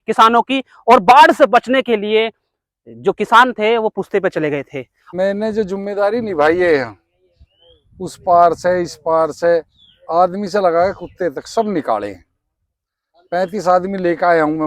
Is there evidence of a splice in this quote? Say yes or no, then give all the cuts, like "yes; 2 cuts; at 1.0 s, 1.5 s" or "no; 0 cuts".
yes; 1 cut; at 5.0 s